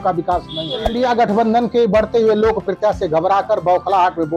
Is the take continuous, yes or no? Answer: no